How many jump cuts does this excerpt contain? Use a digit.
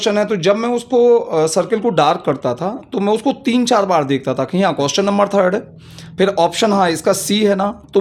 0